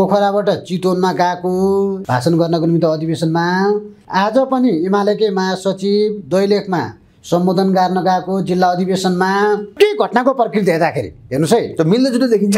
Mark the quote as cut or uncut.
cut